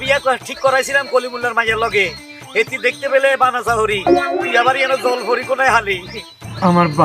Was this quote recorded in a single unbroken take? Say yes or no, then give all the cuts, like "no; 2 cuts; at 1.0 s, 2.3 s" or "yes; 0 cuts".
yes; 0 cuts